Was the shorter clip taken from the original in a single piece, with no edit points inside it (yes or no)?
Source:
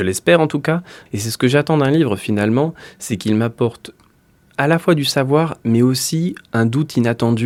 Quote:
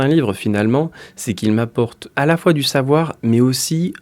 no